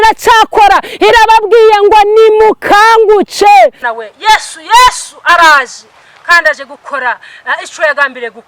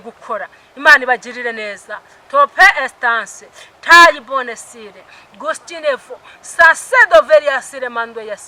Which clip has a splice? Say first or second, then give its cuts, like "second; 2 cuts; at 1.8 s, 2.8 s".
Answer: first; 1 cut; at 3.9 s